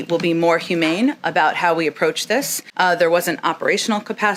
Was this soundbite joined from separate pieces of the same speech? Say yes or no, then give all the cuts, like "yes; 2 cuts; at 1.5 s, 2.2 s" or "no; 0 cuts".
no; 0 cuts